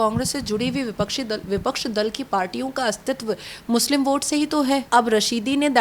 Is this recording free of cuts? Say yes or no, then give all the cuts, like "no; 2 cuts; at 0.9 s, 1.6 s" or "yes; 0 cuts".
no; 1 cut; at 4.8 s